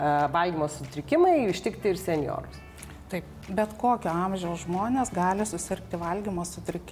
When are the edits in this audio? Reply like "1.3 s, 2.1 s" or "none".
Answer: none